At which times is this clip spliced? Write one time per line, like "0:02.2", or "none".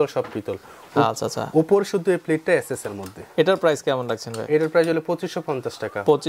none